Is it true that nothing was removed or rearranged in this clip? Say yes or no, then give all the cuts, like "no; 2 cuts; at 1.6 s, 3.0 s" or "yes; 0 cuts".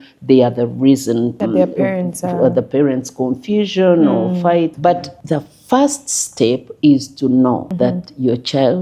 no; 3 cuts; at 1.4 s, 4.9 s, 7.7 s